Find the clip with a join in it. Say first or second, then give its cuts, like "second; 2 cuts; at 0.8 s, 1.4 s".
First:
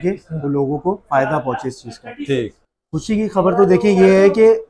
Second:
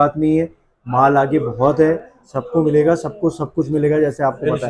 first; 1 cut; at 2.7 s